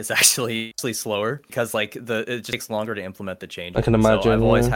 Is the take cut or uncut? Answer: uncut